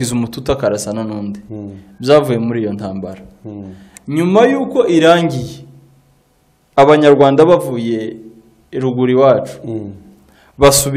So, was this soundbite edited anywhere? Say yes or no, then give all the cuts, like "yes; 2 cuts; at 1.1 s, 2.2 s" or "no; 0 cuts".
no; 0 cuts